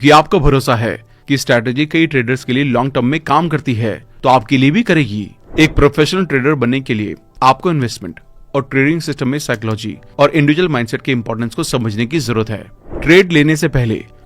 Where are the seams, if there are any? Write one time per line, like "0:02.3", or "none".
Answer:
0:05.4
0:12.7